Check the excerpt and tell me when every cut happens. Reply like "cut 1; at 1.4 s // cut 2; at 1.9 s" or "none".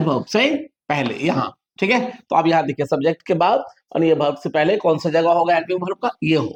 none